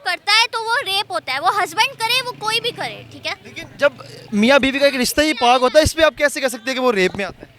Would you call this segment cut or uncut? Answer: uncut